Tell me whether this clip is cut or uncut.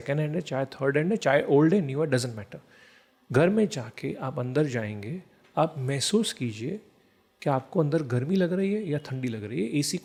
uncut